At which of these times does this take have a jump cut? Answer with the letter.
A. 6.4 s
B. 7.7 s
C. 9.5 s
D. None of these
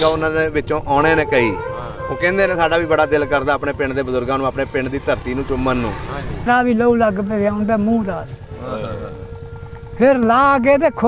A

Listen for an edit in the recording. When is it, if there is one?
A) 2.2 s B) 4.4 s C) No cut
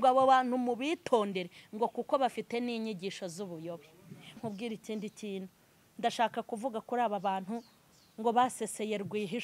B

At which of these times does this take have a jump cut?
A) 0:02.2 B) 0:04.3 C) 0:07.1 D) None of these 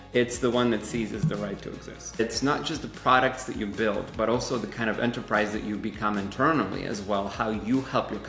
A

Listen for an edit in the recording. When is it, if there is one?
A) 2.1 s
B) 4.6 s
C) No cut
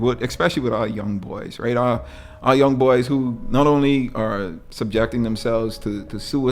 B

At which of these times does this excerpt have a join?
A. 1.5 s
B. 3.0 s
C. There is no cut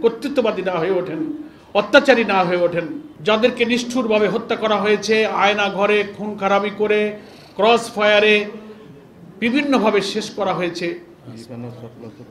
B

